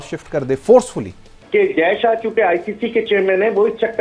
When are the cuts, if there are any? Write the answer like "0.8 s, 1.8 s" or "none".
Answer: 1.4 s